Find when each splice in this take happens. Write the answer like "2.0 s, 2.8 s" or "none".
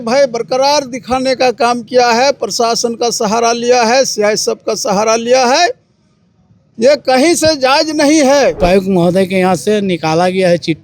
8.6 s